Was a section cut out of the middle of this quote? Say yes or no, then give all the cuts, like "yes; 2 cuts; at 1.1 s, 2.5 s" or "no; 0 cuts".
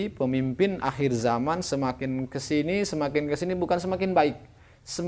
no; 0 cuts